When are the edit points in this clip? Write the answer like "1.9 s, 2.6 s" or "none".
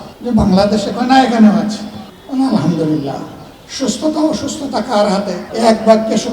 5.4 s